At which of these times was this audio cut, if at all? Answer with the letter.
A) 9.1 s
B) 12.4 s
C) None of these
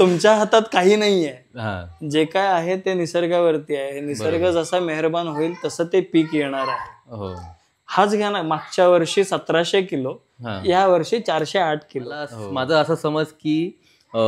B